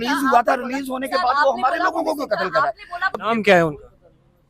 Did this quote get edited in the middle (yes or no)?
yes